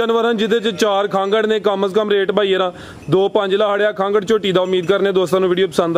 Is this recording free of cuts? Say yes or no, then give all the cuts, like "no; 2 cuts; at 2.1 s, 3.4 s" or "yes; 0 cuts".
yes; 0 cuts